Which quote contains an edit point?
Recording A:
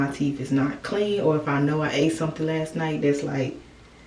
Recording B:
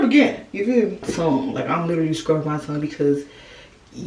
B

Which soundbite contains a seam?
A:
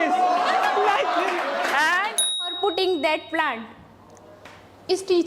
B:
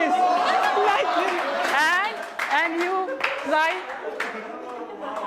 A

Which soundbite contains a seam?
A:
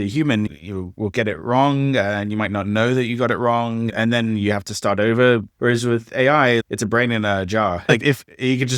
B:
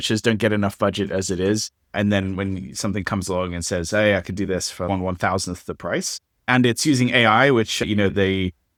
A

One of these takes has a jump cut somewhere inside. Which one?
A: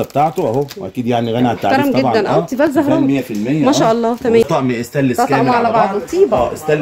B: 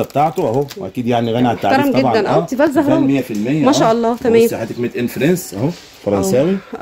A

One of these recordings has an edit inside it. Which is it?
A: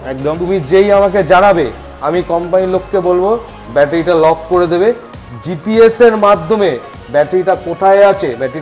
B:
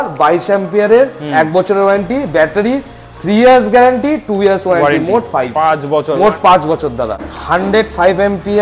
B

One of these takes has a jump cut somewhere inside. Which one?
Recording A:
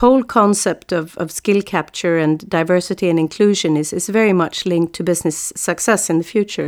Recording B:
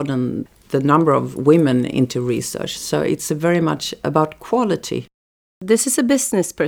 B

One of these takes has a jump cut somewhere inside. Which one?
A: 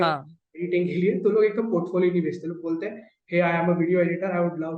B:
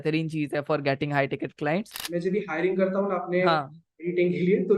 B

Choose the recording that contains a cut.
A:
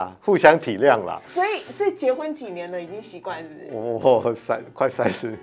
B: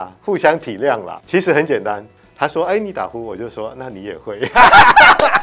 B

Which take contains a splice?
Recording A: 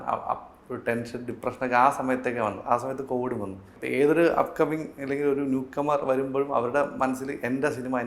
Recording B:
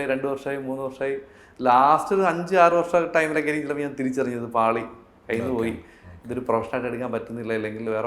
A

